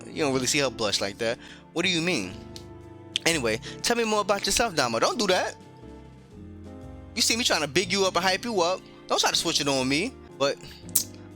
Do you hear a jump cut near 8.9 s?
no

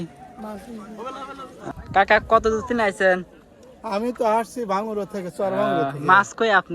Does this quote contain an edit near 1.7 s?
yes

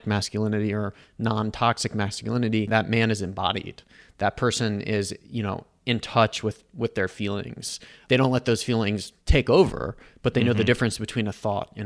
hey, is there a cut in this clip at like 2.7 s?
yes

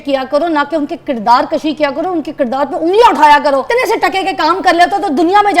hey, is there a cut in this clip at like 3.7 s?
yes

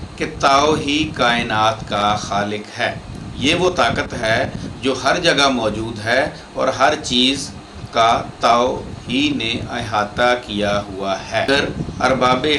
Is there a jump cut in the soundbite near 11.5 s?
yes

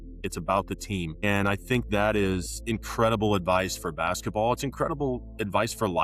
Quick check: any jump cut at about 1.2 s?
yes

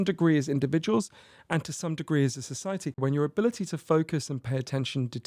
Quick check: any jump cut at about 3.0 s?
yes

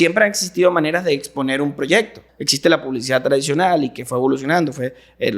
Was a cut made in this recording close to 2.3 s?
yes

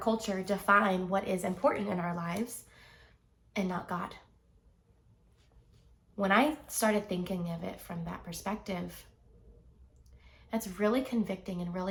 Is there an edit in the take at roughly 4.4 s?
no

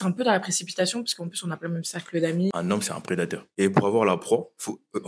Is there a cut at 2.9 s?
yes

